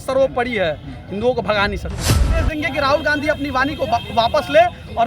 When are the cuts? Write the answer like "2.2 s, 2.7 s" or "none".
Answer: 2.3 s